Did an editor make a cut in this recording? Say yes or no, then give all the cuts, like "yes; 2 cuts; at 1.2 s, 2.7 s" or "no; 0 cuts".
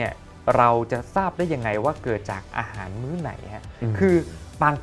no; 0 cuts